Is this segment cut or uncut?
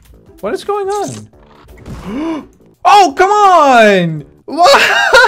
uncut